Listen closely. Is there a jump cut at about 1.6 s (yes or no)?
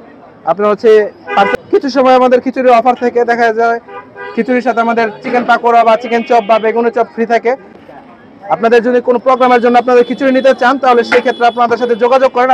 yes